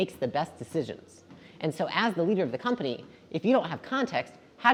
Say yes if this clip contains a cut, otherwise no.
no